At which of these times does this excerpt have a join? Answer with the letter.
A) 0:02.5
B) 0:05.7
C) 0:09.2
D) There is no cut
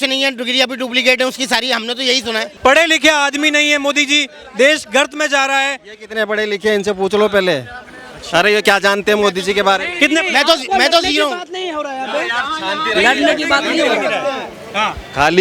A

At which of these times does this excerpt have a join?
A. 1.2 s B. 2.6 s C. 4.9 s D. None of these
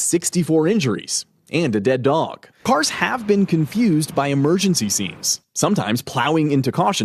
B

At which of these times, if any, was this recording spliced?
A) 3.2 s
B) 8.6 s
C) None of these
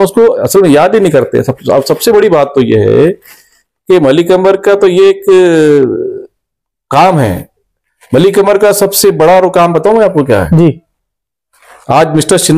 C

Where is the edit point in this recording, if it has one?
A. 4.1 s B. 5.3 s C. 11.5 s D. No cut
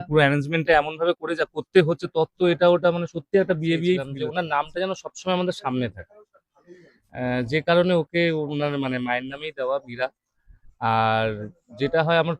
A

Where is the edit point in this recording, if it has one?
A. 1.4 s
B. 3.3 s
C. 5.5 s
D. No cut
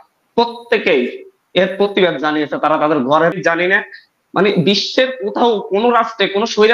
B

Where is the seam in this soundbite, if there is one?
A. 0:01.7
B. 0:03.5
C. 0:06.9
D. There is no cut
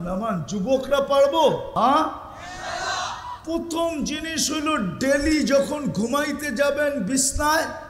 A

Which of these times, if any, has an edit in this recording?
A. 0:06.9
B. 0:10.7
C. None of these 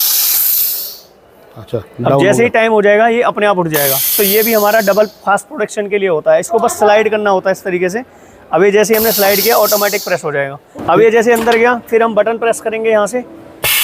B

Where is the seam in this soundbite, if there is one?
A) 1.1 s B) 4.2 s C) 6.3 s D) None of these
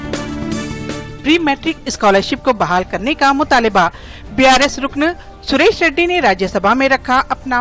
A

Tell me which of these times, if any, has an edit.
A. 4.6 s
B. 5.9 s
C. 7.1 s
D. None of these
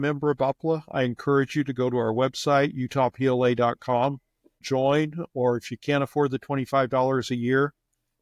A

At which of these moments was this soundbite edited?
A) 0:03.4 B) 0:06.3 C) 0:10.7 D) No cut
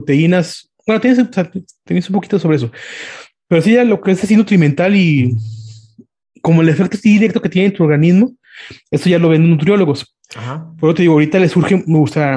D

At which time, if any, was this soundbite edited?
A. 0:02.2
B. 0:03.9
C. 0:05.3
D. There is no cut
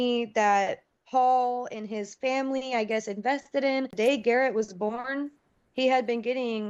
B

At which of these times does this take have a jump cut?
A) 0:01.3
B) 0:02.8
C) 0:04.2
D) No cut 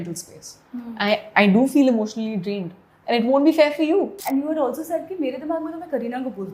C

